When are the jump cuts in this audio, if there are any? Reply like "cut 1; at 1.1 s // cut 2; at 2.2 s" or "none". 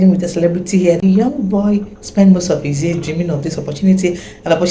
cut 1; at 1.0 s